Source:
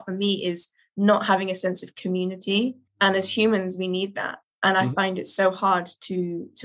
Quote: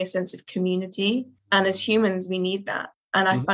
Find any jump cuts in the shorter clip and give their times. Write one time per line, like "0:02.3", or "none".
none

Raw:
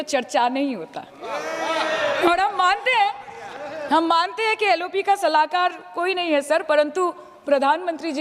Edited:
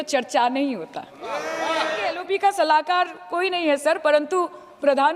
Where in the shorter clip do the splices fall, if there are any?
0:02.1

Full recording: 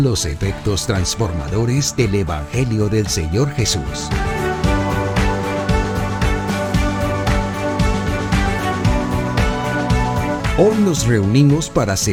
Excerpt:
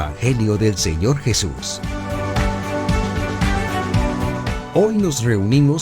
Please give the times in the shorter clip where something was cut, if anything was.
0:01.6
0:04.6

